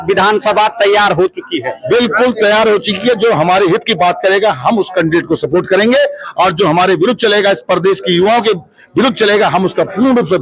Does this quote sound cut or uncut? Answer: uncut